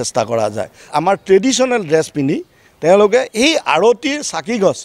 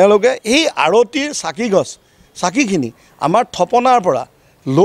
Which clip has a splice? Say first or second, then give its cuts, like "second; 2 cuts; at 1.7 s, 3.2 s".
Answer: first; 1 cut; at 0.9 s